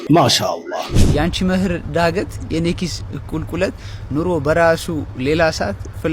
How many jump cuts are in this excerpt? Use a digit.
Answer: 1